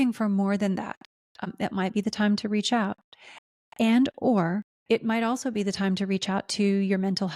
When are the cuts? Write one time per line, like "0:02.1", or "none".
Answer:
0:01.4
0:04.7